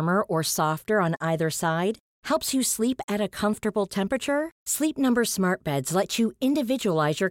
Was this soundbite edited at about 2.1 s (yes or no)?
no